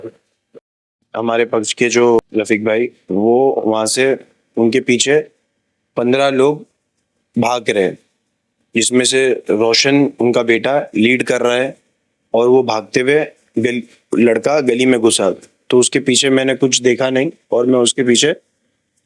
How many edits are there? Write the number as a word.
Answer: two